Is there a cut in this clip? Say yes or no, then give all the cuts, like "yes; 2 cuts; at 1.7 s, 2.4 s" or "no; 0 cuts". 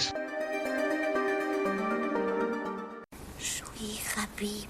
yes; 1 cut; at 3.7 s